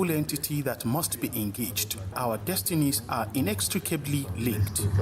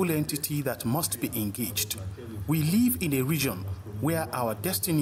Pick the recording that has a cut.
first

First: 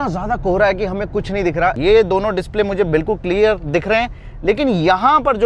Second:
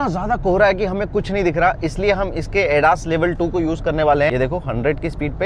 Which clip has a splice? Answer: first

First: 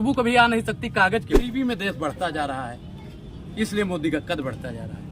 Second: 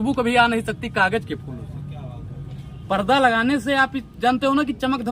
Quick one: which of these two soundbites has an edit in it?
first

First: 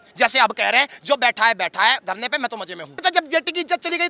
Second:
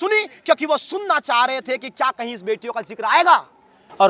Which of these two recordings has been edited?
first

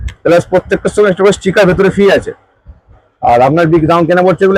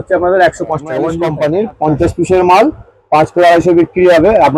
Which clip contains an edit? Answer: second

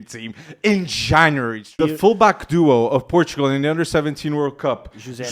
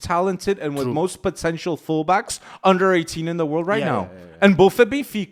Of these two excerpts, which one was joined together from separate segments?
first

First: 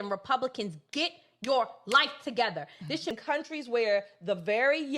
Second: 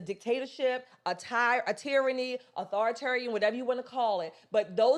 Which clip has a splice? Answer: first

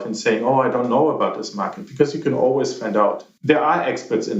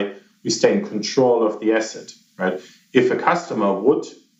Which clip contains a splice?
first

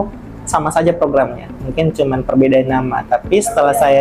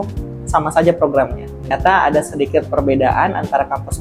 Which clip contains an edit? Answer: second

